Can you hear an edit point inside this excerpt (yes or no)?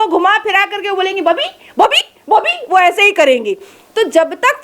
no